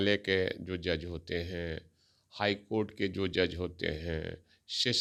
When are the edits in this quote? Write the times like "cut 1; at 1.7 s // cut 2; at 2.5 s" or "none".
none